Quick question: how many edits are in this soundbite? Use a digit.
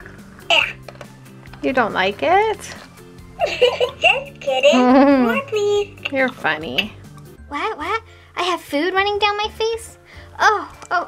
1